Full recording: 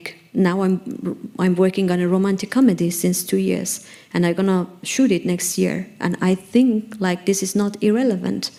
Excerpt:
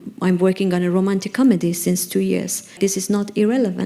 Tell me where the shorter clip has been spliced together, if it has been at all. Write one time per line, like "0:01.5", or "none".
0:02.7